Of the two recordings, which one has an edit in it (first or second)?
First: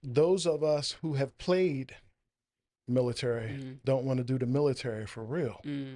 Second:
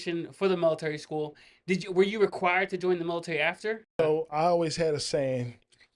second